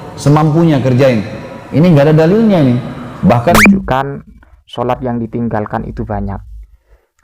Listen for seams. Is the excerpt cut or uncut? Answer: cut